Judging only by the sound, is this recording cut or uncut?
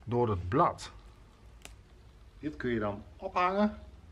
cut